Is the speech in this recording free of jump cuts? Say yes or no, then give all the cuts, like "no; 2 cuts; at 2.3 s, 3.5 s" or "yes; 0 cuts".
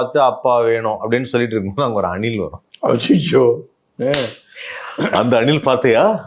no; 1 cut; at 2.6 s